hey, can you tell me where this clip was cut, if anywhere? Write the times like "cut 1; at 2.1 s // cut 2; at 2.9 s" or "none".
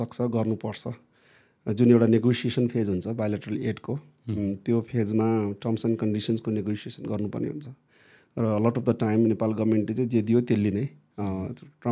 none